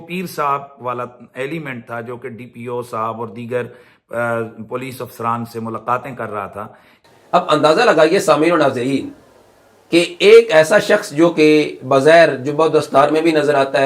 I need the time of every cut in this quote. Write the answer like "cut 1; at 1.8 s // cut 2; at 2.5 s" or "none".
cut 1; at 6.9 s